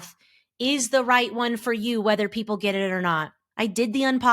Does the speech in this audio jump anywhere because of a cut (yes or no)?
yes